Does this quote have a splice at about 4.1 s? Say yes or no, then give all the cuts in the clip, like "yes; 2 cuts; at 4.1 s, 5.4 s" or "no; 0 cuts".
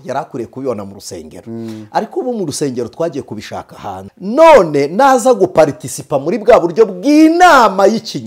yes; 1 cut; at 4.1 s